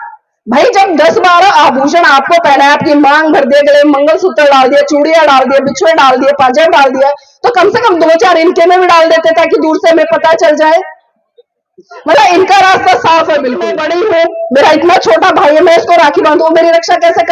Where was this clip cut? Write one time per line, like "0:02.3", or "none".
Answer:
0:13.8